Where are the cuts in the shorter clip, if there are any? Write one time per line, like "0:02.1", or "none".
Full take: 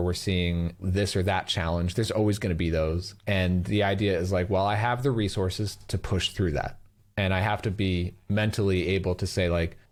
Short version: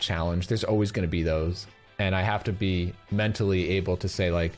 0:01.6